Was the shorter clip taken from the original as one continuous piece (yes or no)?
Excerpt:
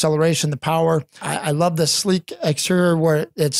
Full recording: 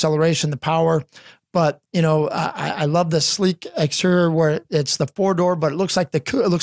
no